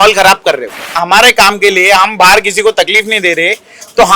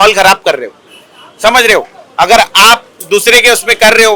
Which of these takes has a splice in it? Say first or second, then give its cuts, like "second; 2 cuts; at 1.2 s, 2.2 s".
first; 1 cut; at 1.0 s